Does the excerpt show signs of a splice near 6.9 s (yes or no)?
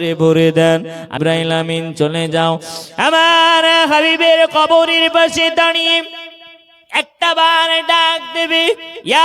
no